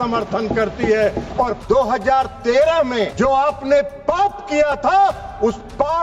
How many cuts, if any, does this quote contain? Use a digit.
2